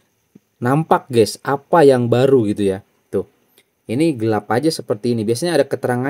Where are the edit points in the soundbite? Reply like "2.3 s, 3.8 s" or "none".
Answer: none